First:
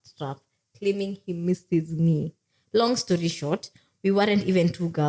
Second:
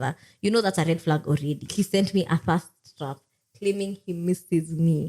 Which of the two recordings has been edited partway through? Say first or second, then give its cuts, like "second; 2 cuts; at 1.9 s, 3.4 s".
second; 1 cut; at 1.7 s